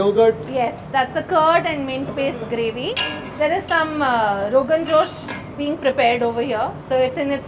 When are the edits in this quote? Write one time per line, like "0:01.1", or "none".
0:02.9